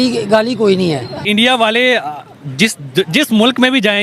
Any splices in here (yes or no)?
yes